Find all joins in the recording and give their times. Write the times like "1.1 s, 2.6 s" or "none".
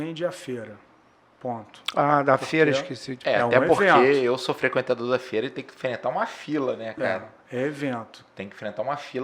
none